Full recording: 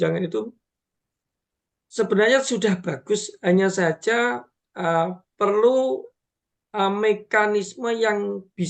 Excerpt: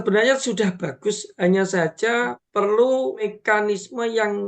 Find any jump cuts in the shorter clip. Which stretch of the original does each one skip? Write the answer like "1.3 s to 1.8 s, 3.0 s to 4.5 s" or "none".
4.4 s to 5.3 s, 6.2 s to 7.2 s